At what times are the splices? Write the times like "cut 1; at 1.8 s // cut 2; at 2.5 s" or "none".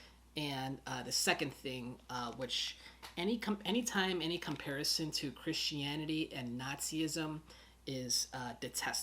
none